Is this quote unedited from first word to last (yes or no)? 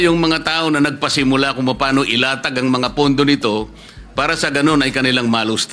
yes